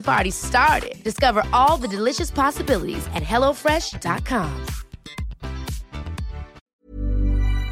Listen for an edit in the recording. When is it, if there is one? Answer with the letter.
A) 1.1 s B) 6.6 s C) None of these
B